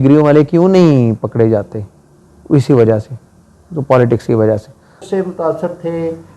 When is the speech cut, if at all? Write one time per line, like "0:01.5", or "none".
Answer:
0:05.0